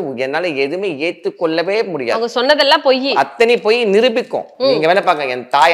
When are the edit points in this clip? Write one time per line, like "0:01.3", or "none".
none